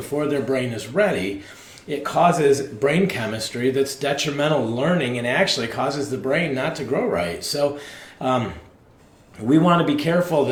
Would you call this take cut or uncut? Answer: uncut